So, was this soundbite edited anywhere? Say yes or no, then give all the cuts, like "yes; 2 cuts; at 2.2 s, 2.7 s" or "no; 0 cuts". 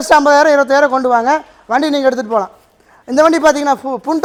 no; 0 cuts